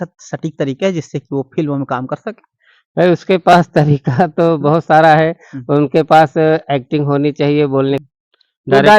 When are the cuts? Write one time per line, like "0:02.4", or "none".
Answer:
0:08.1